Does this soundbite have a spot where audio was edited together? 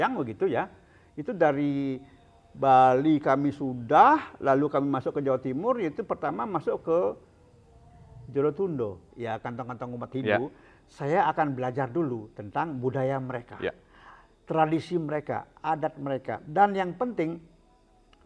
yes; 1 cut; at 9.1 s

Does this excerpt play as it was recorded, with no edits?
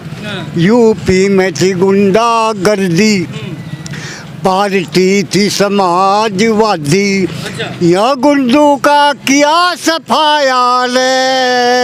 yes; 0 cuts

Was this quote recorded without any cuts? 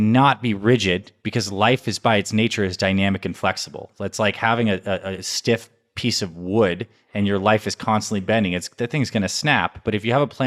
yes; 0 cuts

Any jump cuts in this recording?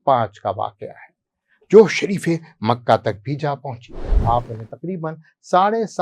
yes; 1 cut; at 4.1 s

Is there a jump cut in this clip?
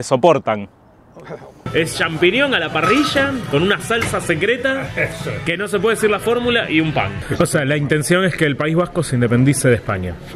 yes; 2 cuts; at 1.5 s, 7.2 s

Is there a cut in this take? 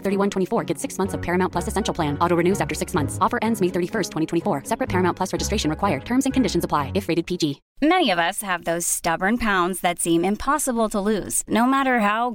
yes; 1 cut; at 7.6 s

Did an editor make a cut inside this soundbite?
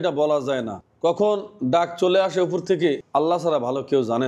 no; 0 cuts

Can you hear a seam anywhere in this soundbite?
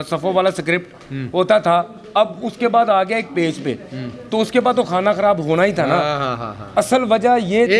no; 0 cuts

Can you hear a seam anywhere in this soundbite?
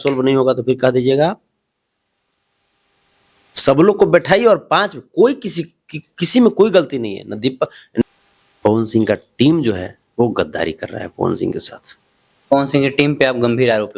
yes; 1 cut; at 8.0 s

